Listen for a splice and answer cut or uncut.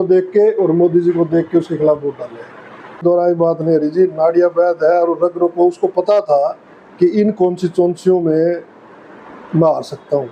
cut